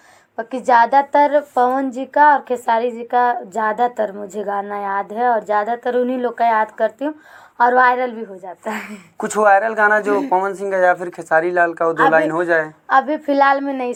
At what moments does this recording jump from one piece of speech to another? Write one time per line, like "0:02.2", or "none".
none